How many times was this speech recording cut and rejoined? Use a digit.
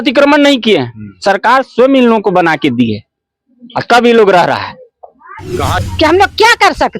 1